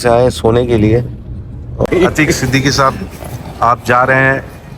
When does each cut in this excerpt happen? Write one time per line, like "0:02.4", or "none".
0:01.9